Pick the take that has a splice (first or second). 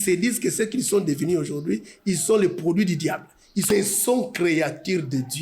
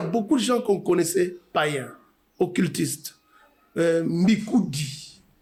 first